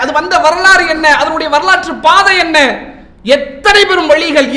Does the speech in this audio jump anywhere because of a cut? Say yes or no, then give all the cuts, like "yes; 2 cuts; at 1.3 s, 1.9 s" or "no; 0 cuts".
no; 0 cuts